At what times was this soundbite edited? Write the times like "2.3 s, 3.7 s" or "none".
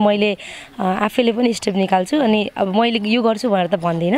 none

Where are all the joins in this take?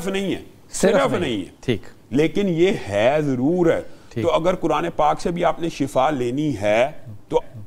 none

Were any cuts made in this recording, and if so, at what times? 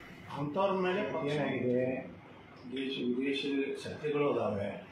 1.1 s

